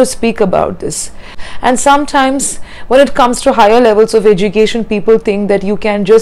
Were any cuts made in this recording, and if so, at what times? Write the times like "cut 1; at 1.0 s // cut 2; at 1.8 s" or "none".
cut 1; at 1.4 s